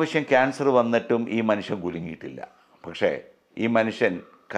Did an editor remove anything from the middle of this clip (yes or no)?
no